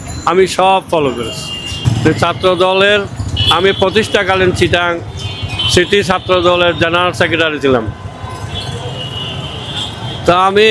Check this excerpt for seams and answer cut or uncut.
cut